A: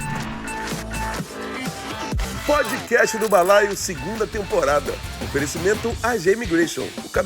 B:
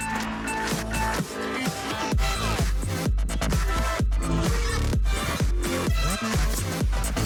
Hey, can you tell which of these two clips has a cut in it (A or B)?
A